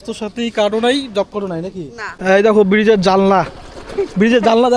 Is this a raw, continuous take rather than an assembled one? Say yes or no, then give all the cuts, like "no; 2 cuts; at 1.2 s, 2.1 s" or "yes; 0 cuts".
no; 1 cut; at 2.1 s